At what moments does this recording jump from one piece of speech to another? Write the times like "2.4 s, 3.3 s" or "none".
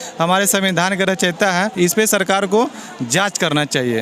1.7 s